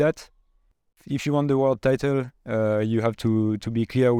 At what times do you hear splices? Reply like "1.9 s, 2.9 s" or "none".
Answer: 1.0 s